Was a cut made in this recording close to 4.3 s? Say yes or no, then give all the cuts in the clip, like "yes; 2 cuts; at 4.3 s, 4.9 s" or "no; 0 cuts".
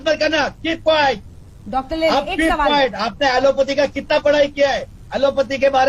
no; 0 cuts